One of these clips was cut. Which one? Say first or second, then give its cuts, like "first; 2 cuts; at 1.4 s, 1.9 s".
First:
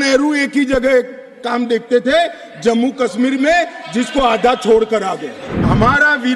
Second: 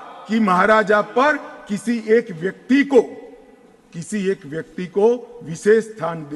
first; 1 cut; at 5.4 s